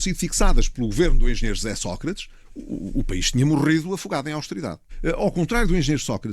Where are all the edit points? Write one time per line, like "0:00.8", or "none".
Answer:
0:04.9